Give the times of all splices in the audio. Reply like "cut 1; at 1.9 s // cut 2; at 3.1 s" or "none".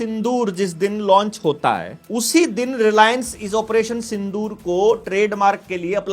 cut 1; at 2.0 s